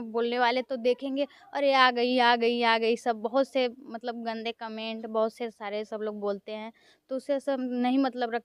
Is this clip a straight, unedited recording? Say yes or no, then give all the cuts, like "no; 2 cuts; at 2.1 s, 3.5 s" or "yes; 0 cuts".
yes; 0 cuts